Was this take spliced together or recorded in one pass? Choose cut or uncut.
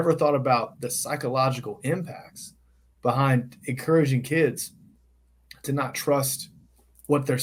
uncut